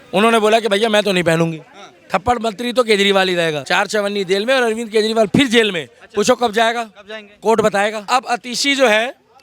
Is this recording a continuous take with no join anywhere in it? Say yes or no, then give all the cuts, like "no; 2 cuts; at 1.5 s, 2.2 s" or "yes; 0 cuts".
no; 2 cuts; at 3.6 s, 8.1 s